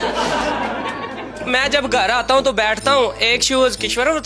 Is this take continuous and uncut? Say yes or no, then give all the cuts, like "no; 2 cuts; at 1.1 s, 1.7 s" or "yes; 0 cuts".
no; 1 cut; at 1.5 s